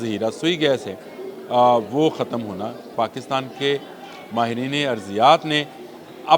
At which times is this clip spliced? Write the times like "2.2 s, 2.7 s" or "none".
2.9 s